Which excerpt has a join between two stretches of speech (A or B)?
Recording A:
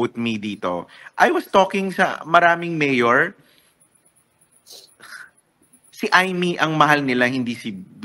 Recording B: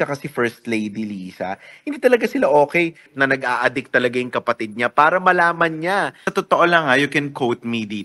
B